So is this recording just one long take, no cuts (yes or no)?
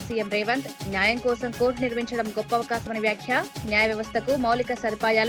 yes